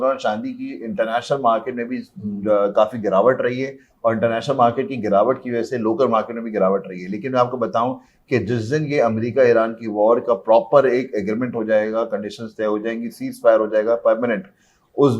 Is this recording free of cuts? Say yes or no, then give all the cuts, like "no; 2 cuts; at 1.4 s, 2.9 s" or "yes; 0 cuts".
yes; 0 cuts